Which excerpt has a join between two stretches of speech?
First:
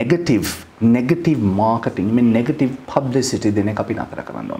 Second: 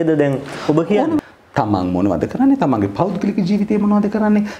second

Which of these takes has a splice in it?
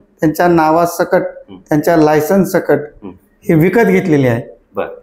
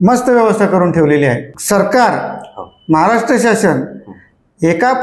second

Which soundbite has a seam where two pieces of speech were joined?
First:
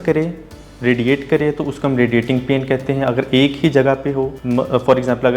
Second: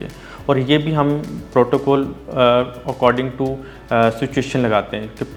first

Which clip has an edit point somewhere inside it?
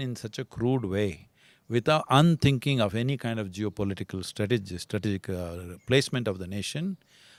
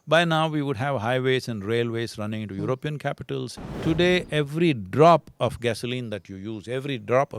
second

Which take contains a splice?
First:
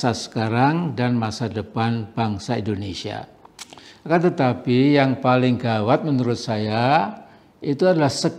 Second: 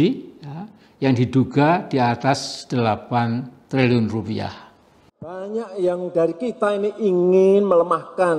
second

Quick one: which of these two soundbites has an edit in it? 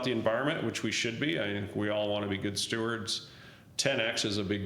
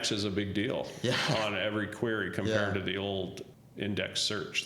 second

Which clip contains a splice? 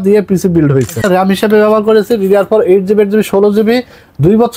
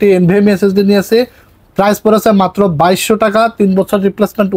first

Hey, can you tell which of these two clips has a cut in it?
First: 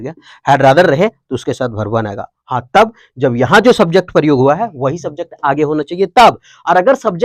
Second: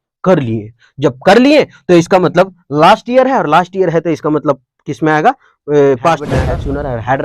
second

